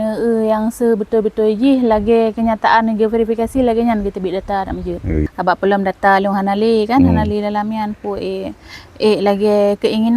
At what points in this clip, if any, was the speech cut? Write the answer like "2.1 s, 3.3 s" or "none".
5.2 s